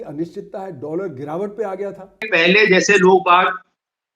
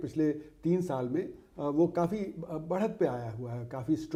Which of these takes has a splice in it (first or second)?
first